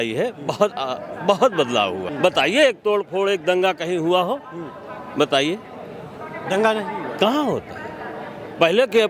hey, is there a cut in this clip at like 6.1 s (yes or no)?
no